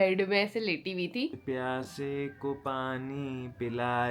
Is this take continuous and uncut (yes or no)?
no